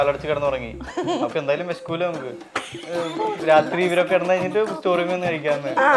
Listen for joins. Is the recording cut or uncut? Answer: cut